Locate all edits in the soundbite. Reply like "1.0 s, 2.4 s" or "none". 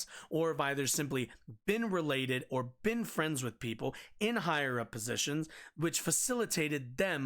none